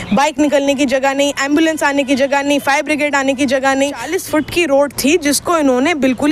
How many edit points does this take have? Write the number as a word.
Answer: one